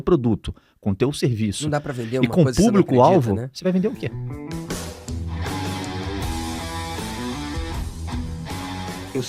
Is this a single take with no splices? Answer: no; 1 cut; at 4.3 s

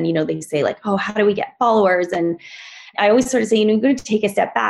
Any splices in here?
yes; 1 cut; at 2.9 s

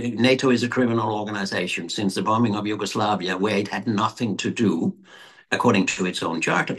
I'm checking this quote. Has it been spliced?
no; 0 cuts

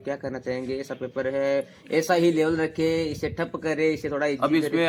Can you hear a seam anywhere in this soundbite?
no; 0 cuts

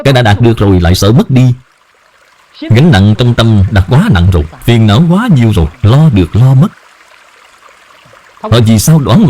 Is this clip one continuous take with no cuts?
yes; 0 cuts

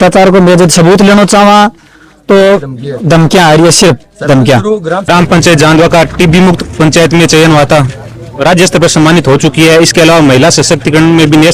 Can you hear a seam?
yes; 1 cut; at 4.9 s

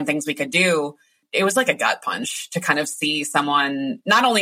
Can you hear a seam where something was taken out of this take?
yes; 1 cut; at 1.2 s

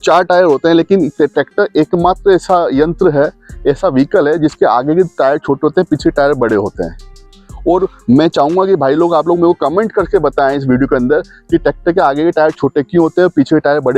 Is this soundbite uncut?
yes; 0 cuts

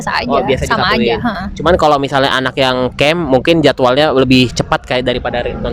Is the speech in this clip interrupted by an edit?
no; 0 cuts

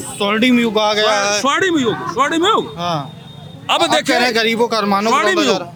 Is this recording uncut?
yes; 0 cuts

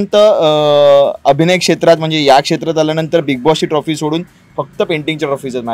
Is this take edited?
no; 0 cuts

